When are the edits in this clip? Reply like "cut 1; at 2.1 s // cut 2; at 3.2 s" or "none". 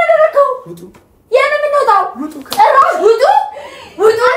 none